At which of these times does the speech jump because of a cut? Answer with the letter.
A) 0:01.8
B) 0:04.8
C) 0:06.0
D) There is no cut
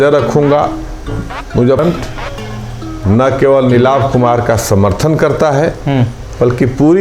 A